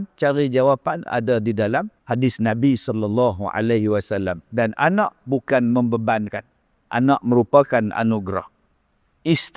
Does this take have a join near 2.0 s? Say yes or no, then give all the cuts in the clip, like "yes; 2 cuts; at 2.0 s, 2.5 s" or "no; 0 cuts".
yes; 1 cut; at 2.0 s